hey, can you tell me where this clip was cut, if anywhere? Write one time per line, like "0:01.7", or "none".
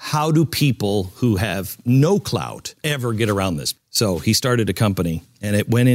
none

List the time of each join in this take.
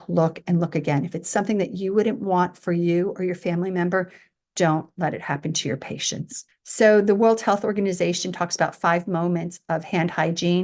none

